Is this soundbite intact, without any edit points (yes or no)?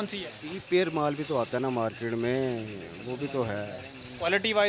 yes